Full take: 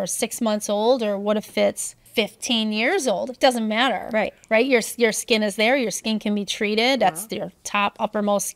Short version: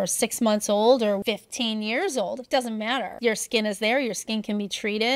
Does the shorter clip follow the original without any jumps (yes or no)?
no